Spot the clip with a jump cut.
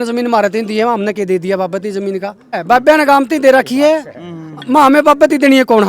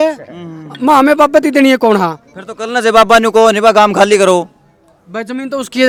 first; 1 cut; at 2.6 s

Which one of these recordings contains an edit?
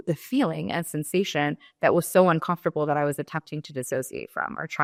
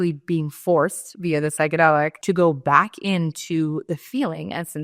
second; 1 cut; at 2.1 s

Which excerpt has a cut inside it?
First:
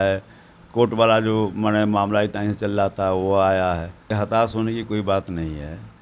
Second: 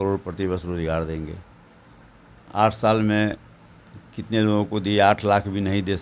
first; 1 cut; at 4.1 s

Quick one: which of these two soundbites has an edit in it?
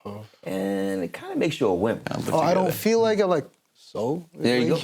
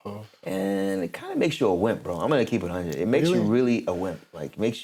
first; 1 cut; at 2.0 s

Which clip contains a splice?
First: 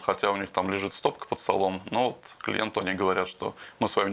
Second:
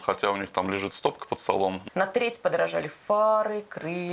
second; 1 cut; at 1.8 s

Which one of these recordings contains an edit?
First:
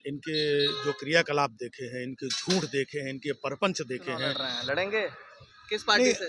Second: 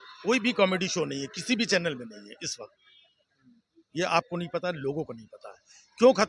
first; 1 cut; at 4.4 s

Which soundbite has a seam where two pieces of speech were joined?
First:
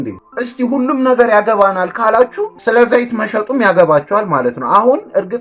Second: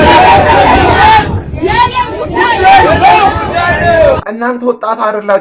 second; 1 cut; at 4.2 s

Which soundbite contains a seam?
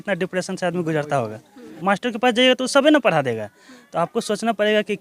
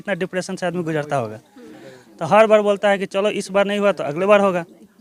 first; 1 cut; at 1.7 s

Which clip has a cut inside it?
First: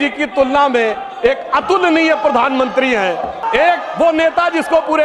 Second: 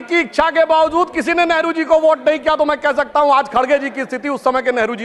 first; 1 cut; at 3.4 s

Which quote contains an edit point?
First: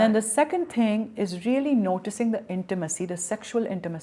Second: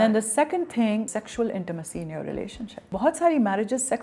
second; 2 cuts; at 1.1 s, 2.9 s

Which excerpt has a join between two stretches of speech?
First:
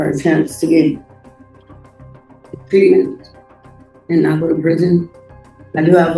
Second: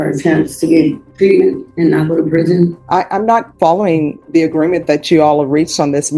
second; 4 cuts; at 1.1 s, 1.7 s, 2.8 s, 4.2 s

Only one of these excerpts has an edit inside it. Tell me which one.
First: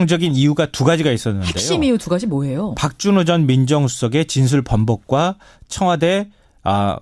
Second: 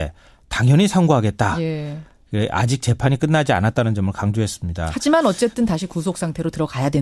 second; 1 cut; at 5.2 s

